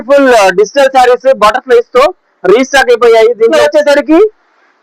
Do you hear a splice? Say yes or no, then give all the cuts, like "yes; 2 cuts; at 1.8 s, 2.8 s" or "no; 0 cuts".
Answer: yes; 1 cut; at 3.5 s